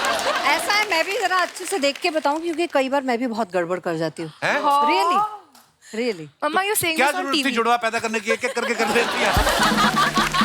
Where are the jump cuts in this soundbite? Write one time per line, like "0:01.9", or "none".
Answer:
none